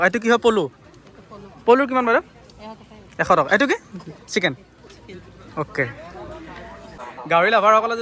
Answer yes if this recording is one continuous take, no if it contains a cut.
no